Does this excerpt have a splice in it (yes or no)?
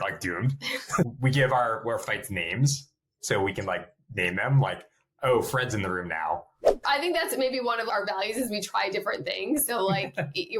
yes